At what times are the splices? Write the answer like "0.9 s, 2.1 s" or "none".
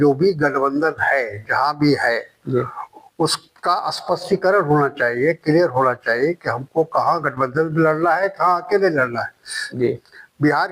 9.7 s